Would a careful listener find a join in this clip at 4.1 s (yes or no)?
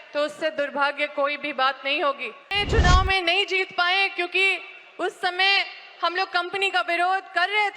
no